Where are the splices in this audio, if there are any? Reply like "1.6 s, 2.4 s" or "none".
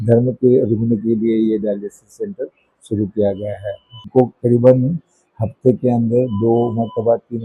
3.9 s